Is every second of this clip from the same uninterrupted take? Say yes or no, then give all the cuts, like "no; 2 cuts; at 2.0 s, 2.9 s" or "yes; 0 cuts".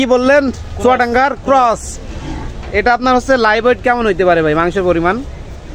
yes; 0 cuts